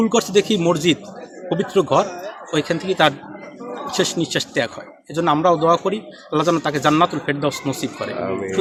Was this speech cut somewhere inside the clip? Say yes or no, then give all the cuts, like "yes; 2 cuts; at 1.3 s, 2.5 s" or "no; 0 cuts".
no; 0 cuts